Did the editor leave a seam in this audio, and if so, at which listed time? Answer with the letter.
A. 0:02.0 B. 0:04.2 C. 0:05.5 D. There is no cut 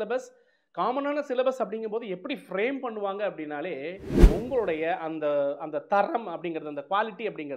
B